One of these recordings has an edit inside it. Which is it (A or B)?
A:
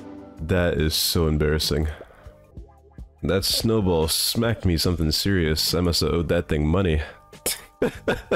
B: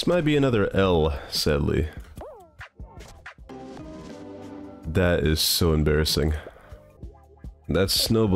B